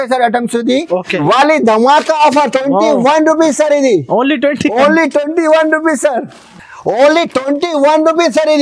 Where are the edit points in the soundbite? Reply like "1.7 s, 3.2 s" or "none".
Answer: 1.2 s

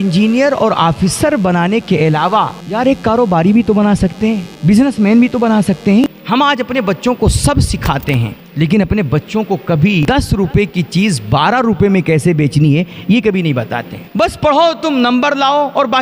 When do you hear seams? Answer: 2.6 s, 4.5 s, 6.0 s, 8.4 s, 10.0 s, 14.1 s

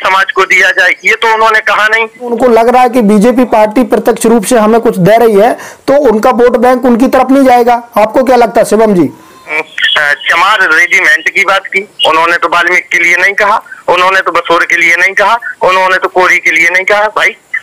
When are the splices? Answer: 2.3 s, 9.5 s

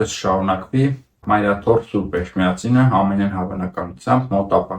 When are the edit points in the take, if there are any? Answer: 1.2 s

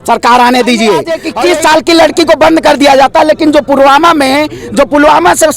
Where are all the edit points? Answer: 1.1 s

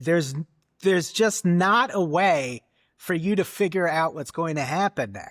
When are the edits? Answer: none

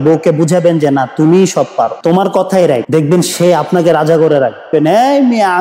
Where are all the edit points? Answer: 2.0 s, 2.9 s, 4.7 s

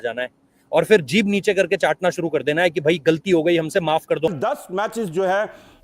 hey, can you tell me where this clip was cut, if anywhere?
4.3 s

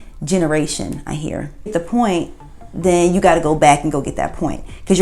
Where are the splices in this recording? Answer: 1.7 s

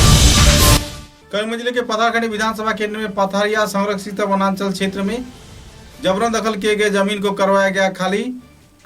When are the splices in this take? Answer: 1.0 s

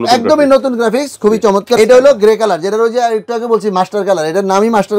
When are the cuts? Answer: 1.8 s

